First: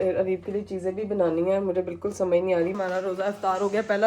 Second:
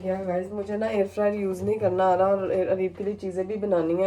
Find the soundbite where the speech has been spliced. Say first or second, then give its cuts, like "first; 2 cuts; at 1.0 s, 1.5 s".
first; 1 cut; at 2.7 s